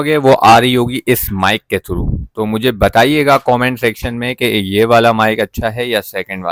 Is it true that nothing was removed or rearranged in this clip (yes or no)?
yes